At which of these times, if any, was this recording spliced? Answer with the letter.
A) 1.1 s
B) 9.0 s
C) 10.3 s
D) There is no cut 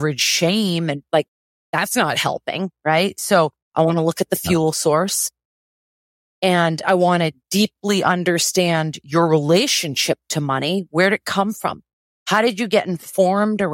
A